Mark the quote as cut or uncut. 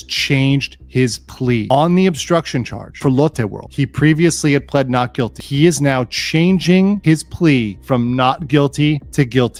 uncut